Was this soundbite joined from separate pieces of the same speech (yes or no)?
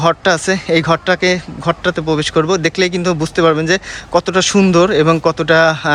no